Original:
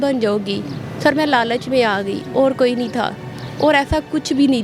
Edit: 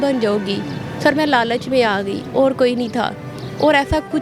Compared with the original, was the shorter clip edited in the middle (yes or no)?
no